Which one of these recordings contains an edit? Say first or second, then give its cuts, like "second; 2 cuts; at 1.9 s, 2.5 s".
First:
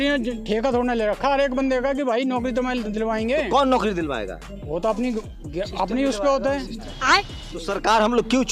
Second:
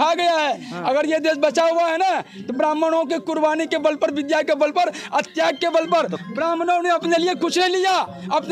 first; 1 cut; at 6.9 s